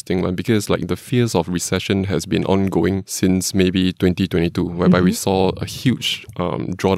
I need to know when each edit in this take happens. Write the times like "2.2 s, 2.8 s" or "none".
3.1 s